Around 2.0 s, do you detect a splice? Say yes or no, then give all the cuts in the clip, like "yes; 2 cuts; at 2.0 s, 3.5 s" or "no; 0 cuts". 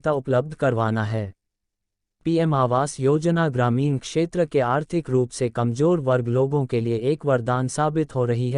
yes; 1 cut; at 2.0 s